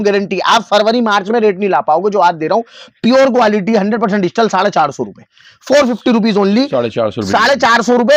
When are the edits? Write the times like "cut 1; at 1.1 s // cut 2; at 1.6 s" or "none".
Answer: none